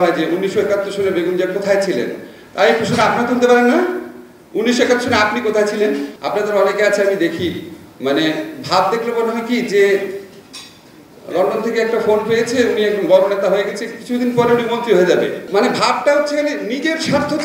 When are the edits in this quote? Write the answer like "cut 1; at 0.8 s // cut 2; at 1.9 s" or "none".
cut 1; at 6.1 s // cut 2; at 15.4 s